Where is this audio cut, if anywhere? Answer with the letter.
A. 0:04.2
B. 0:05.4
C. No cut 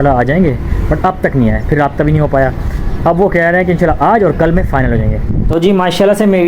B